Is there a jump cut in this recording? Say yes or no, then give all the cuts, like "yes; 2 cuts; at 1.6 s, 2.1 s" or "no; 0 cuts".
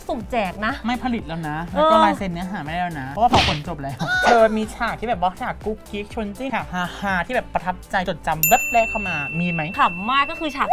yes; 4 cuts; at 4.1 s, 6.5 s, 8.0 s, 9.7 s